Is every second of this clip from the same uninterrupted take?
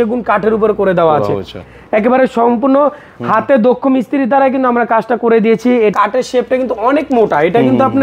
no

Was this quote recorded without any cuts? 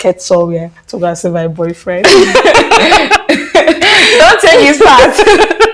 yes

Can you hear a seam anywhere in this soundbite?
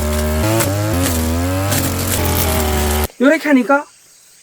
yes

